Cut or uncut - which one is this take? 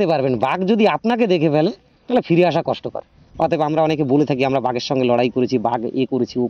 uncut